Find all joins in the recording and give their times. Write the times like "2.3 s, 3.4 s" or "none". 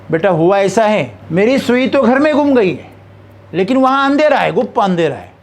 1.2 s